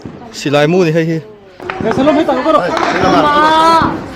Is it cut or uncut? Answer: cut